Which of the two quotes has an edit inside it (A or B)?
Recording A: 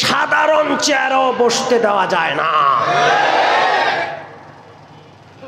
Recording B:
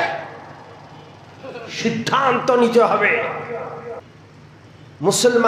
B